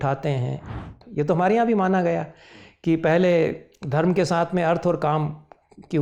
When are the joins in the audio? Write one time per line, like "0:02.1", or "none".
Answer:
0:01.0